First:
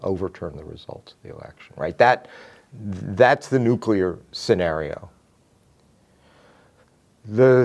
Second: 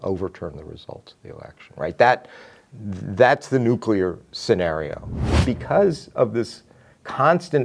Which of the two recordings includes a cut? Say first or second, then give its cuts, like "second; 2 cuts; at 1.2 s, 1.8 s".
second; 1 cut; at 5.4 s